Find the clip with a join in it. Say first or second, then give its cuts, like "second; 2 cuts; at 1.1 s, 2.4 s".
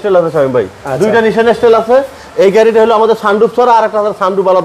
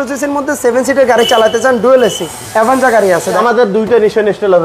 second; 2 cuts; at 2.3 s, 3.4 s